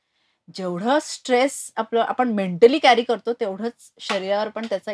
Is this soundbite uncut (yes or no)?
yes